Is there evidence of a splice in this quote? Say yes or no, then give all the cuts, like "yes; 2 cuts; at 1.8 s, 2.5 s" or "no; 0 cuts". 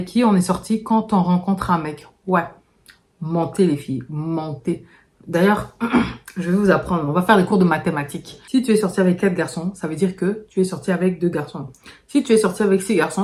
no; 0 cuts